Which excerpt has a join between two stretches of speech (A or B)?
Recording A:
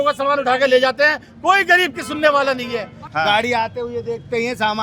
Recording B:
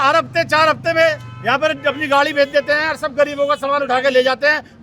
A